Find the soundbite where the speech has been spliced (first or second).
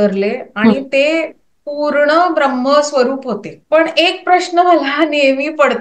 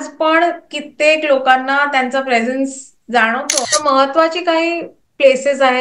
second